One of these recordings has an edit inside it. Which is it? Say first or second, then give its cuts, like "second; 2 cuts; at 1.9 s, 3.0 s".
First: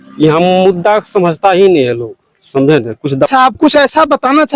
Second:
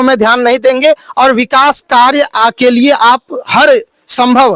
first; 1 cut; at 3.3 s